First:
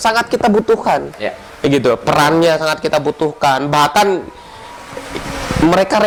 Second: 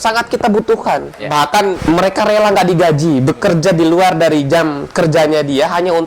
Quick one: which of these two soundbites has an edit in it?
second; 1 cut; at 1.4 s

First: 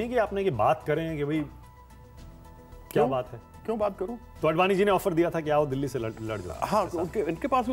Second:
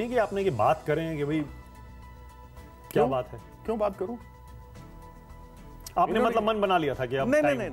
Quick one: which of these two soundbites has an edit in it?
first; 1 cut; at 4.2 s

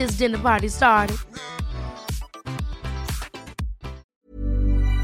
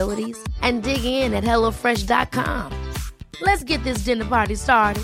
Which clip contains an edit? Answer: first; 1 cut; at 4.1 s

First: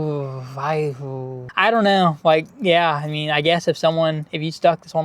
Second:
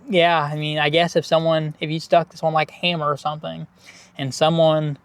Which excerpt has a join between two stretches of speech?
first; 1 cut; at 1.4 s

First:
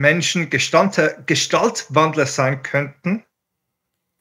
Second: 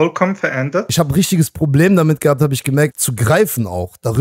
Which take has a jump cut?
second; 2 cuts; at 0.9 s, 3.0 s

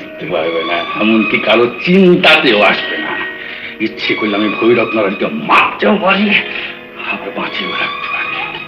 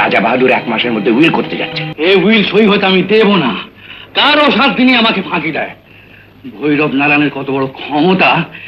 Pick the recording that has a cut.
second; 1 cut; at 1.9 s

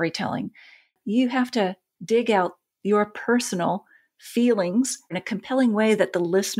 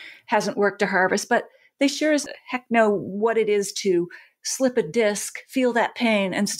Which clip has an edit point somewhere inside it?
first; 3 cuts; at 0.9 s, 1.9 s, 5.2 s

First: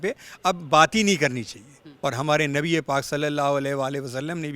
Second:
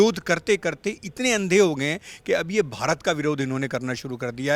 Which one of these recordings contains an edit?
first; 1 cut; at 1.9 s

